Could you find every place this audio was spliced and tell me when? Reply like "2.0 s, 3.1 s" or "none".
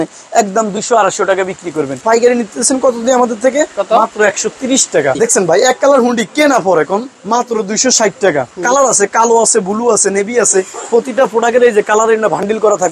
2.0 s, 5.2 s, 7.1 s, 8.5 s